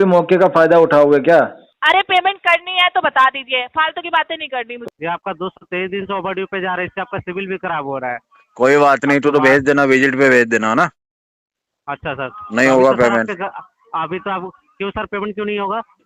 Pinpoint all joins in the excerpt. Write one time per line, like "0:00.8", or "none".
0:01.7
0:04.8